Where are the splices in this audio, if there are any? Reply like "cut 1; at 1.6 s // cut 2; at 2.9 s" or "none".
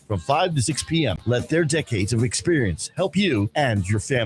cut 1; at 1.2 s